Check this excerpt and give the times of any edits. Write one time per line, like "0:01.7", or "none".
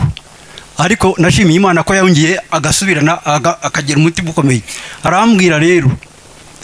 none